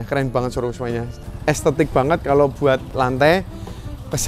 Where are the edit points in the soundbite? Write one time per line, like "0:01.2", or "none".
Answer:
0:01.1
0:02.9